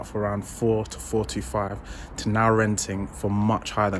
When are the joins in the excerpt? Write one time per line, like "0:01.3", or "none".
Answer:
none